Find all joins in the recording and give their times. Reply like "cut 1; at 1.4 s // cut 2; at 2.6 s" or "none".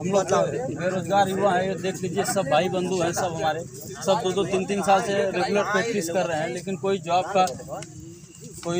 none